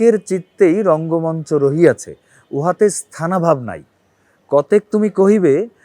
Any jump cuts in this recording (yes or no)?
no